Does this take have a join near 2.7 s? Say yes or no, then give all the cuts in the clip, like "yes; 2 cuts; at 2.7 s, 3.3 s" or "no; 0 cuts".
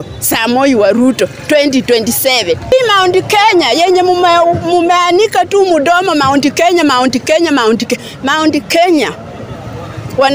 yes; 1 cut; at 2.7 s